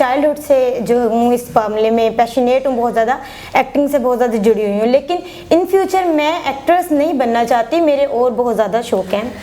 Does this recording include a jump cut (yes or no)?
no